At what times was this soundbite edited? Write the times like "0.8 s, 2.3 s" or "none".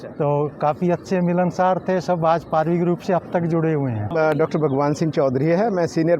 4.1 s